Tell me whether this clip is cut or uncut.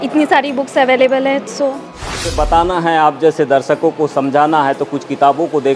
cut